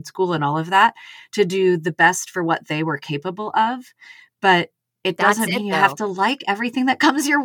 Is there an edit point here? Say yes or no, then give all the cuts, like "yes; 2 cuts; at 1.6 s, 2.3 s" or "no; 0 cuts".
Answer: no; 0 cuts